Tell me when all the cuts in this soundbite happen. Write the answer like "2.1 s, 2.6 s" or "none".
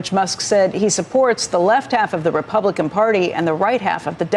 none